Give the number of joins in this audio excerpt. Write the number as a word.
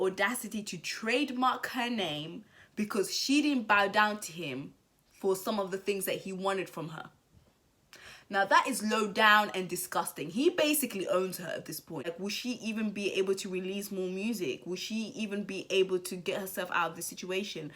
one